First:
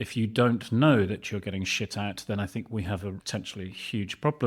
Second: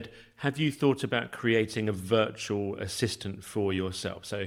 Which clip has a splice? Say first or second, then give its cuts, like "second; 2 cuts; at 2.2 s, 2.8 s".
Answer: first; 1 cut; at 3.2 s